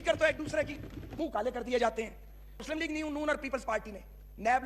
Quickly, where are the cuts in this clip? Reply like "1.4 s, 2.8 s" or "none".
1.0 s, 2.6 s